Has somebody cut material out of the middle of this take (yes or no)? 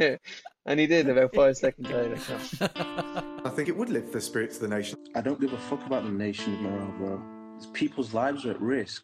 yes